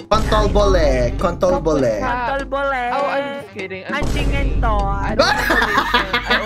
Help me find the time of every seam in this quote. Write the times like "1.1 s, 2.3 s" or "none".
none